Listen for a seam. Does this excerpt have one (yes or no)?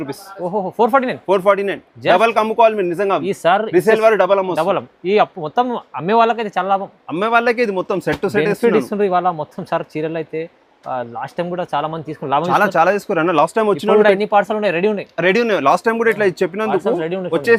no